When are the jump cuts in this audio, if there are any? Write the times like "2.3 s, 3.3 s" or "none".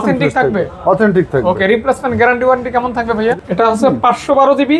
3.4 s